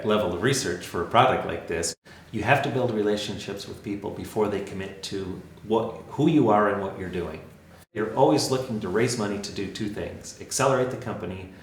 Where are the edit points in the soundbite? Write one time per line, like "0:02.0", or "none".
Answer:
0:01.9
0:08.0